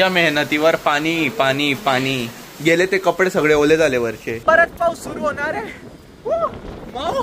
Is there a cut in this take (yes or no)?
yes